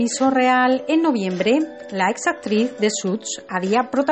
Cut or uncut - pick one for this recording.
cut